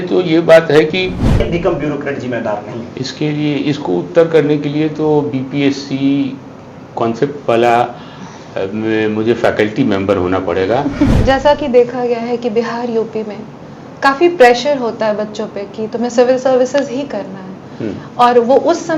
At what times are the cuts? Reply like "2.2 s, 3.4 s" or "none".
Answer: 1.5 s, 11.2 s